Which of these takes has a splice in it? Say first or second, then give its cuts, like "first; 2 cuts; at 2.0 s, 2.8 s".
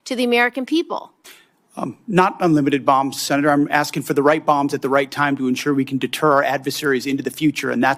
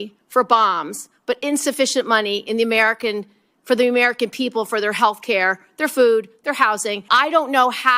second; 1 cut; at 7.1 s